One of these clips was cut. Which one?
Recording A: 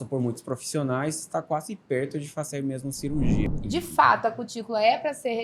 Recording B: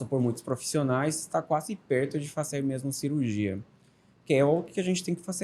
A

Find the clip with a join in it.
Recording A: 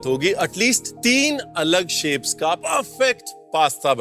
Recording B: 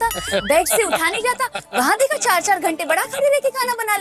A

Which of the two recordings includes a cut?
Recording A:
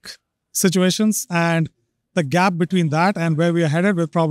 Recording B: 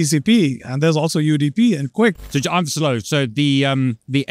B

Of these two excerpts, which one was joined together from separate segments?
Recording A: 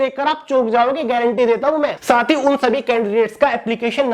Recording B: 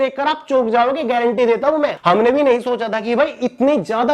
A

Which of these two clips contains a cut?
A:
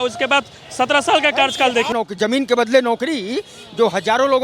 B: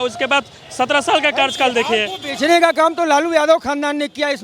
A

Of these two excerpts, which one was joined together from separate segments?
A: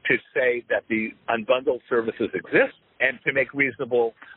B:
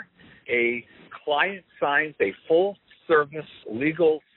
A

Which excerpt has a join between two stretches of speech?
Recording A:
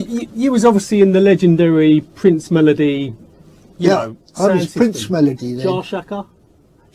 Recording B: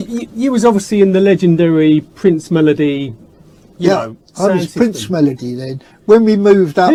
A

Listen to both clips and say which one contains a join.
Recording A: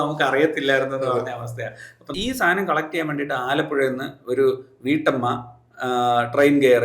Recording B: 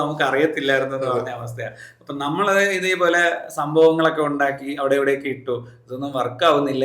A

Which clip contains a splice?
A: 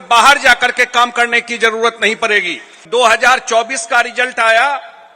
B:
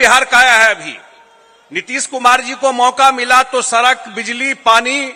A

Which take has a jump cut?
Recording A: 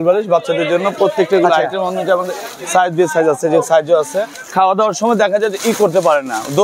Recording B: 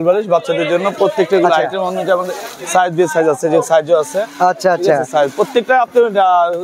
A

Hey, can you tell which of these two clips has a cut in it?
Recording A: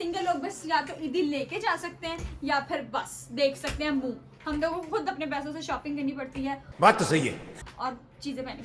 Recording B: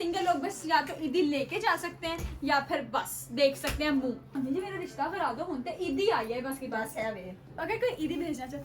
B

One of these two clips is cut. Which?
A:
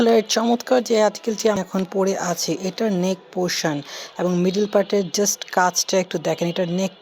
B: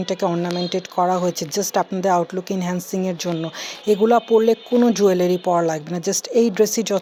A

